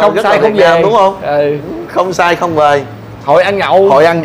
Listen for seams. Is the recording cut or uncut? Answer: uncut